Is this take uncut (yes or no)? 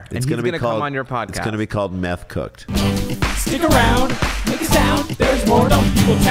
no